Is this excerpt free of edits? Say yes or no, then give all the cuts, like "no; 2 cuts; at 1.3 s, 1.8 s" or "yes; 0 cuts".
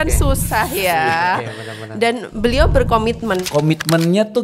no; 1 cut; at 3.4 s